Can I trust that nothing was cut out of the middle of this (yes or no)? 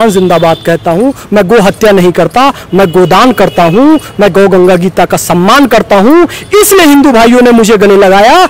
yes